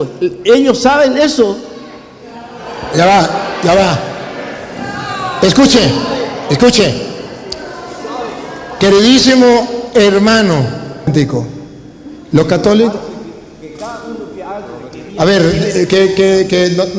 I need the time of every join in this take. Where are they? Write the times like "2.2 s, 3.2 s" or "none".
11.1 s